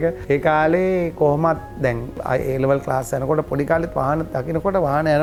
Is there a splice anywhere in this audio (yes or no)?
no